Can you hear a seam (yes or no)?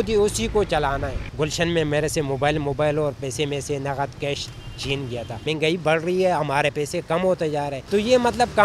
yes